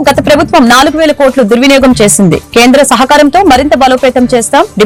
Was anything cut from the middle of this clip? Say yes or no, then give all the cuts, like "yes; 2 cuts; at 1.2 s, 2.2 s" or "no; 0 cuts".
no; 0 cuts